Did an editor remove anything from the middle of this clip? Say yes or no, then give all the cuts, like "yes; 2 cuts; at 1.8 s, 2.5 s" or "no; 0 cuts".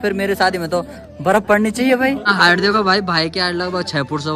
yes; 1 cut; at 2.3 s